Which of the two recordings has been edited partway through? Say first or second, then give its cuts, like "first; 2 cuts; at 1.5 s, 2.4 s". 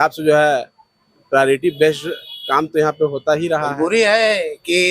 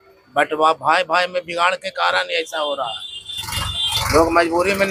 first; 1 cut; at 3.7 s